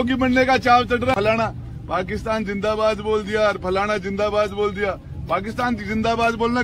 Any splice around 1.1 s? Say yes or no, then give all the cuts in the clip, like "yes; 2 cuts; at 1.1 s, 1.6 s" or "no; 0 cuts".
yes; 1 cut; at 1.1 s